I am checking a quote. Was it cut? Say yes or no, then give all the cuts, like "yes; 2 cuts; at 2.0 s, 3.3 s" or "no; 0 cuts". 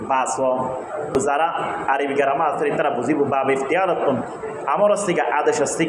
yes; 1 cut; at 1.1 s